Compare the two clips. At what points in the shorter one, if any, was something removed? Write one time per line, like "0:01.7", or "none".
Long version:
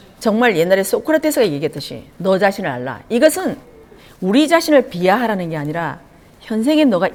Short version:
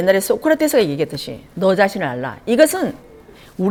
none